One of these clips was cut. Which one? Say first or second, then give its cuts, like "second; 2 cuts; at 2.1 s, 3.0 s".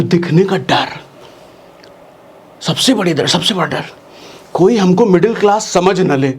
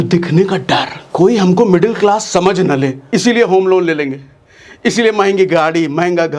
second; 2 cuts; at 1.0 s, 3.0 s